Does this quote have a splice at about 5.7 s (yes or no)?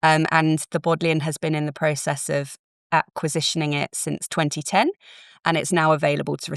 no